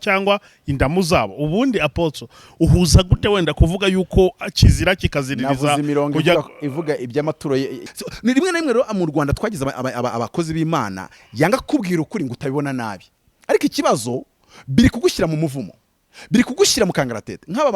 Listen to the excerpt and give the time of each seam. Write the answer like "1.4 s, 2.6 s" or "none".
7.9 s